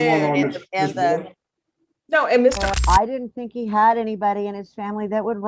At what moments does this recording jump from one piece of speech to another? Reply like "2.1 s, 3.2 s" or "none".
2.7 s